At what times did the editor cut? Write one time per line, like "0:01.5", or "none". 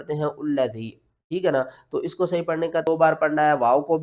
0:02.9